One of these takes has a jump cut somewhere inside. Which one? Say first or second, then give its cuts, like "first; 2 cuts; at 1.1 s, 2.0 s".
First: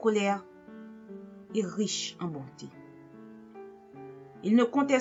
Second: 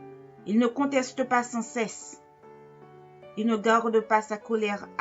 second; 2 cuts; at 2.0 s, 3.3 s